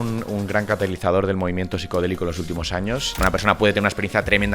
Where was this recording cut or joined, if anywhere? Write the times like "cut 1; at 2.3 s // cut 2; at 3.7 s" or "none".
cut 1; at 3.2 s